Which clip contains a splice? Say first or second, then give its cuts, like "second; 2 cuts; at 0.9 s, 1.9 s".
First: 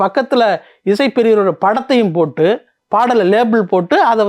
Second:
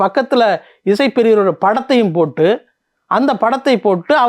first; 1 cut; at 2.7 s